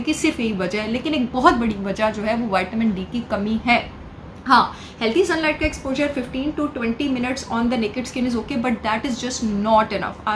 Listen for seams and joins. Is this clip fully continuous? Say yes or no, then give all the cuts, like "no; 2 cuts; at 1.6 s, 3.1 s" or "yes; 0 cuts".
yes; 0 cuts